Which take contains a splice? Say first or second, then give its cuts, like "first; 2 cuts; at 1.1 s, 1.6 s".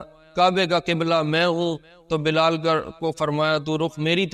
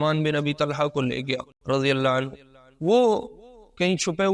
second; 1 cut; at 1.5 s